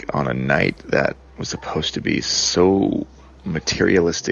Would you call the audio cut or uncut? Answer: uncut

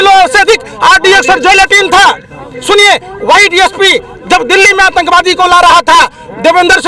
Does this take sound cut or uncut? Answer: uncut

